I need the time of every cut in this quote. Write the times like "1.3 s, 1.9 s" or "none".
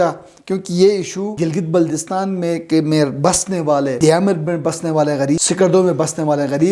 1.3 s, 4.0 s, 5.4 s